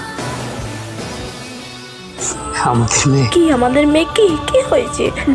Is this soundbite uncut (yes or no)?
no